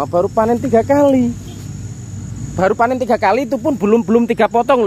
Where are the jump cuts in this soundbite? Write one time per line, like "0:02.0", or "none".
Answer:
none